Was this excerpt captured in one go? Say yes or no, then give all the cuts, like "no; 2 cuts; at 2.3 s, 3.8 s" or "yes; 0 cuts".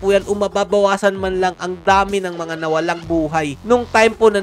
yes; 0 cuts